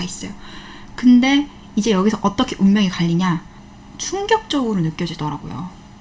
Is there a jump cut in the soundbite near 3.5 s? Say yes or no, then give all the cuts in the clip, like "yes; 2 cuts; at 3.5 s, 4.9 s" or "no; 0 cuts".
yes; 1 cut; at 3.5 s